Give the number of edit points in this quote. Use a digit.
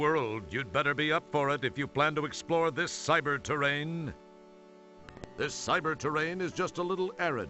1